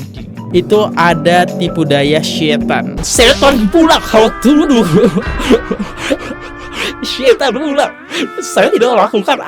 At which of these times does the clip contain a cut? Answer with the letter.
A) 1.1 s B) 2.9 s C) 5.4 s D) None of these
B